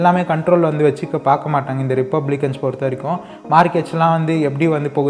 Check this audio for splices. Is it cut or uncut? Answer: uncut